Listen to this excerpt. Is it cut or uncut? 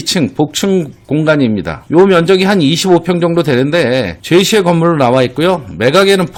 uncut